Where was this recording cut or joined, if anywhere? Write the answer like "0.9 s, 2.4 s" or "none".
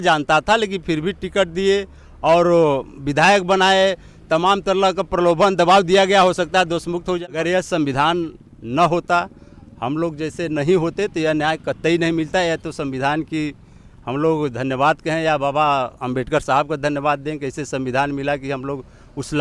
7.2 s